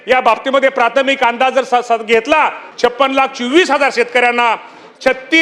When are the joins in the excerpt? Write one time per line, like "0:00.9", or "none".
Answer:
0:02.6